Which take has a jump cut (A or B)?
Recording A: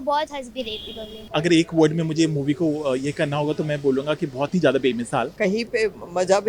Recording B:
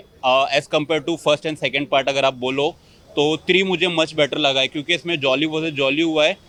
A